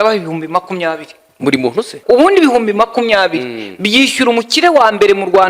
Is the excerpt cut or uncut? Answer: cut